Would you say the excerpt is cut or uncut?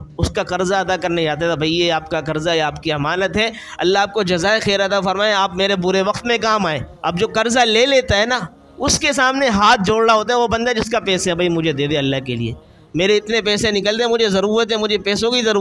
cut